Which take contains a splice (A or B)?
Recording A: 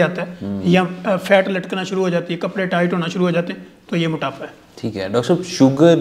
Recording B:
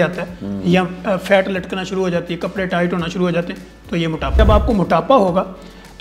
B